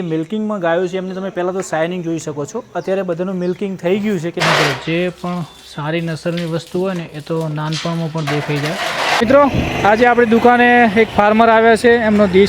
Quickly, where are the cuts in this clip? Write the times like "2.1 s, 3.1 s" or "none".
4.3 s, 9.2 s